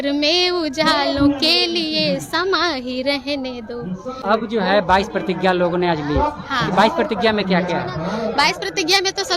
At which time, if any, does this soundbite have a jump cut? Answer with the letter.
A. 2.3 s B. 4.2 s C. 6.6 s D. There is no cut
B